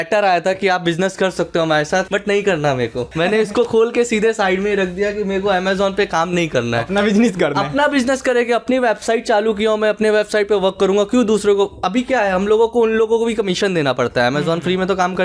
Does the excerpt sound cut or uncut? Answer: uncut